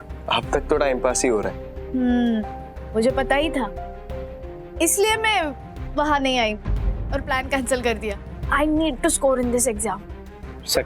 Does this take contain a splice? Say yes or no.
no